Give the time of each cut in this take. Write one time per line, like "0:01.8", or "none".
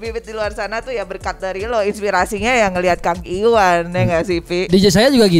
none